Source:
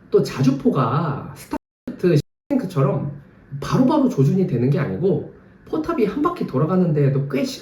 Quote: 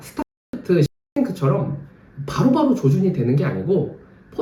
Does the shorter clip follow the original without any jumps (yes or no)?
yes